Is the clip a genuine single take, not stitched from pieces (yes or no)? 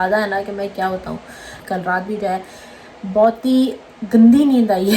no